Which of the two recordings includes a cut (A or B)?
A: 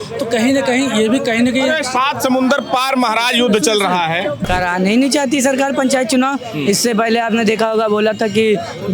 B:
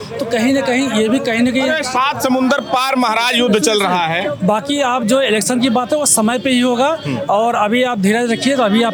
A